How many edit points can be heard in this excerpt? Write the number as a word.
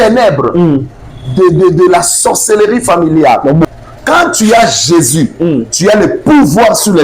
one